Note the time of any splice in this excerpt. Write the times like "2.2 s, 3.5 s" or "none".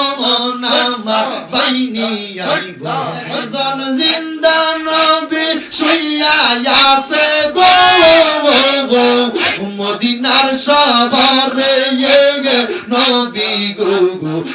3.4 s